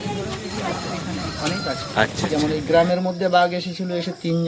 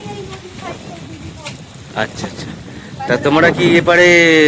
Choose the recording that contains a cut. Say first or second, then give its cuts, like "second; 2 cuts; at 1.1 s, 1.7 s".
first; 1 cut; at 2.3 s